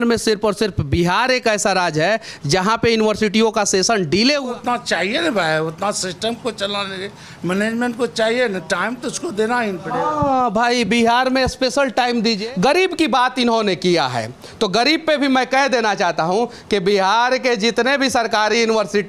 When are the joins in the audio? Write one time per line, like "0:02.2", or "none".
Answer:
0:04.5
0:12.4